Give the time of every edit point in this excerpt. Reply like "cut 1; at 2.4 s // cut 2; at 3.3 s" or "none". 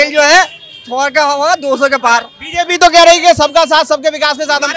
none